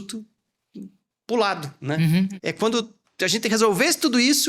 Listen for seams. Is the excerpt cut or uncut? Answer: cut